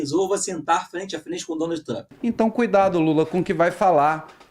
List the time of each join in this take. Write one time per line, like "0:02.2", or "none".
0:02.1